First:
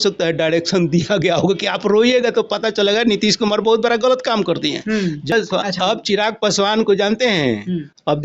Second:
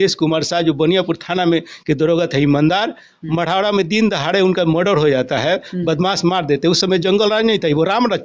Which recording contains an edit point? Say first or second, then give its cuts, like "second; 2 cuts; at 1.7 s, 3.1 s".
first; 1 cut; at 5.3 s